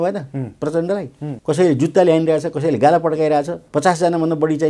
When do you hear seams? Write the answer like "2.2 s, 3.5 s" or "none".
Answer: 1.2 s, 3.6 s